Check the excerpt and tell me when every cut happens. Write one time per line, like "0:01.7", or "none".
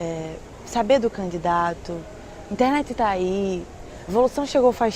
none